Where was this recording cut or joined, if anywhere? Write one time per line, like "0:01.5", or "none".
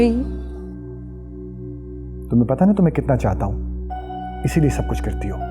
none